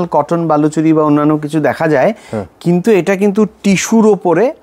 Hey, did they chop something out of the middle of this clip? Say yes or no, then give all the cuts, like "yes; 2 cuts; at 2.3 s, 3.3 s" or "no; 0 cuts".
no; 0 cuts